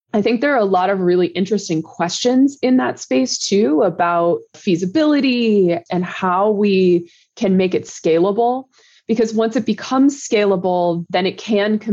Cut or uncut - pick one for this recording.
uncut